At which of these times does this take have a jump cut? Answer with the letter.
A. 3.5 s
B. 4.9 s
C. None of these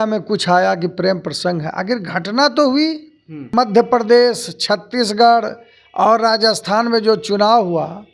A